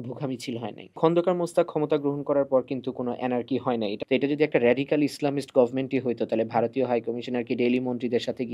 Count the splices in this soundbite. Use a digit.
2